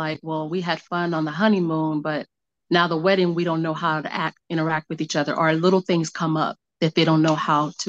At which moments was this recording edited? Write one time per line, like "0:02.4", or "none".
0:06.6